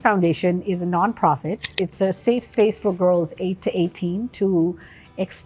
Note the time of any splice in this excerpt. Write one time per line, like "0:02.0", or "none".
0:01.7